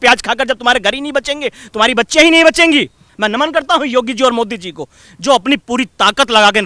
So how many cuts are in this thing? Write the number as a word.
one